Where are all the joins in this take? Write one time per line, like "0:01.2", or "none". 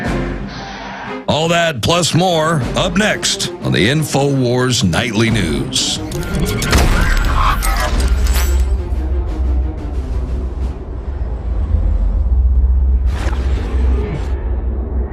0:11.9